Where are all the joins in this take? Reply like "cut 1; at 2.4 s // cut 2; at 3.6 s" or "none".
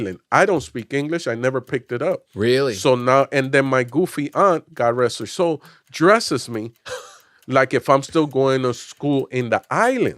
cut 1; at 2.3 s